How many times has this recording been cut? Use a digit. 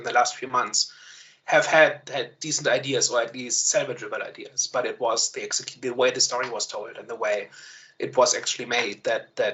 0